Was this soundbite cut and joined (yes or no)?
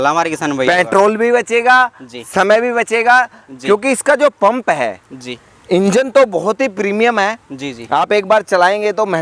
no